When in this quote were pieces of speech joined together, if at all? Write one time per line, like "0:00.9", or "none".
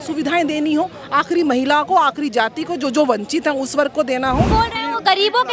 0:04.5